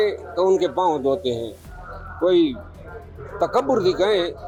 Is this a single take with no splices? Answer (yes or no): yes